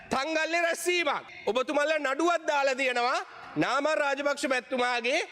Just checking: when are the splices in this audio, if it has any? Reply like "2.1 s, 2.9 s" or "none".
1.3 s